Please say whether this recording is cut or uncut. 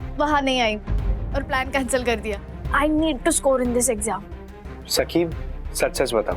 uncut